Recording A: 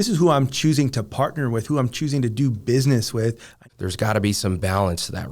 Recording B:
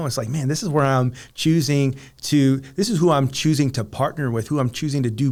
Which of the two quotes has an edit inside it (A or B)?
A